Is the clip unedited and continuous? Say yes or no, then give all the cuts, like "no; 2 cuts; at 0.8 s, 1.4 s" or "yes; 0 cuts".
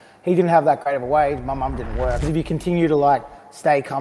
no; 1 cut; at 2.3 s